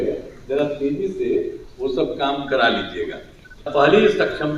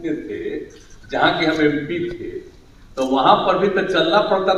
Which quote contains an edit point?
first; 1 cut; at 3.7 s

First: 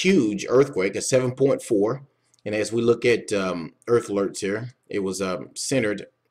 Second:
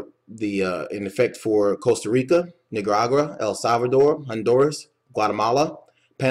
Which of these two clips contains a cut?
second; 1 cut; at 4.8 s

